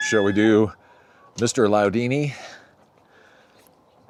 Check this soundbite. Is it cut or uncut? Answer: uncut